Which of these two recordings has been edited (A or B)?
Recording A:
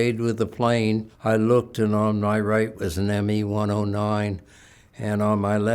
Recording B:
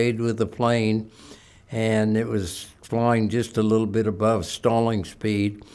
A